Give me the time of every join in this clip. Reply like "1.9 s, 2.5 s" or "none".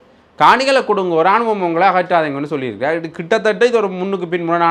none